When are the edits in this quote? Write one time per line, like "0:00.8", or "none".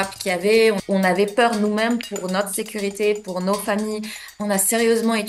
0:00.8
0:04.3